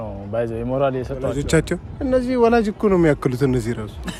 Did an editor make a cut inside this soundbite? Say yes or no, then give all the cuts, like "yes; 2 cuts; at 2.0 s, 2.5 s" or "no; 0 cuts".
no; 0 cuts